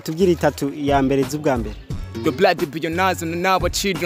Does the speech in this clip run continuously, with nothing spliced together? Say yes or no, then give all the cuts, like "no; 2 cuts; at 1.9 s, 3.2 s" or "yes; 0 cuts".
no; 1 cut; at 2.0 s